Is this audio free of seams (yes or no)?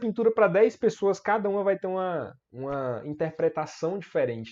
yes